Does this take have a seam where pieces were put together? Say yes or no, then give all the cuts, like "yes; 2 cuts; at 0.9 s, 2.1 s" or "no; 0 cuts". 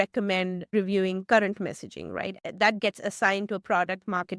yes; 2 cuts; at 0.7 s, 2.4 s